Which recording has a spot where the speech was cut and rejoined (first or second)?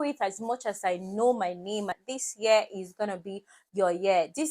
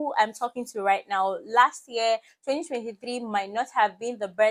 first